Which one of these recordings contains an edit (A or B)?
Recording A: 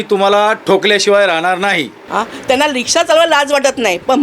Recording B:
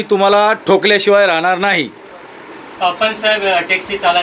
A